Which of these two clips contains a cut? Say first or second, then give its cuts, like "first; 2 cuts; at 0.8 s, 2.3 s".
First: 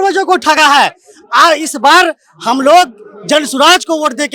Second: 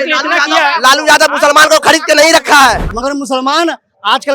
second; 1 cut; at 2.9 s